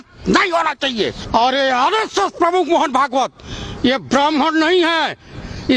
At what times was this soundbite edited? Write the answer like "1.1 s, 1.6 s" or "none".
1.2 s

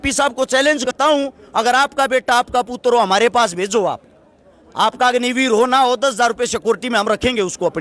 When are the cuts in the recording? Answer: 0.9 s

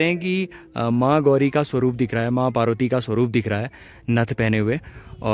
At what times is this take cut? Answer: none

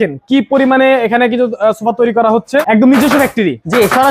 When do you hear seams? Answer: 2.6 s

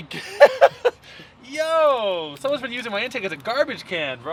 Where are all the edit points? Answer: none

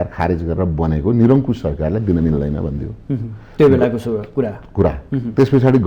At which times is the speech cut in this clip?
none

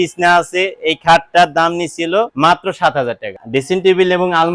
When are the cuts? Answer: 2.3 s, 3.4 s

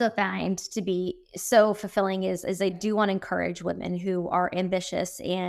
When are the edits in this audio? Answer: 1.3 s, 2.8 s

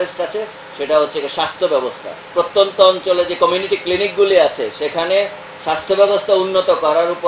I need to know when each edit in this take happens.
2.2 s

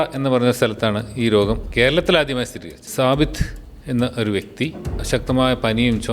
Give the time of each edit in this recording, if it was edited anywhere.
1.7 s, 2.8 s, 5.0 s

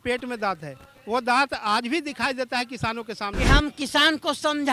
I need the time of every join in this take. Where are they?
3.4 s

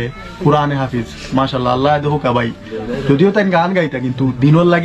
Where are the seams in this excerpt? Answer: none

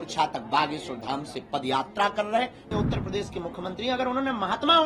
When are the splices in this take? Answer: 2.7 s

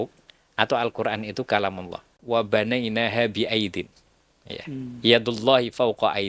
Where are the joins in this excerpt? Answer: 2.2 s

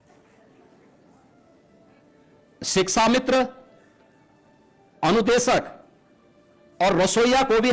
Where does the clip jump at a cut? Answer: none

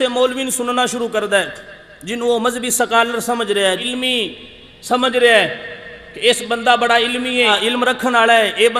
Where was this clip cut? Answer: 3.8 s, 7.5 s

